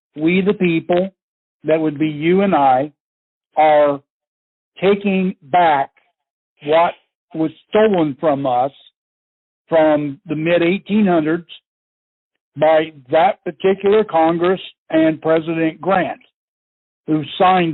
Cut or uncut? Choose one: uncut